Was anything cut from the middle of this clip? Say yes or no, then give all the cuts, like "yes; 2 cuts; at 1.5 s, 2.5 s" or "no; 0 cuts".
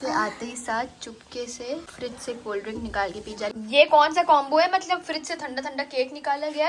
yes; 2 cuts; at 1.9 s, 3.5 s